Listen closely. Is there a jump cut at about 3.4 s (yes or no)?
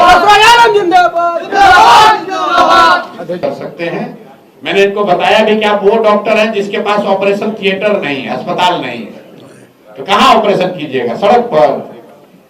yes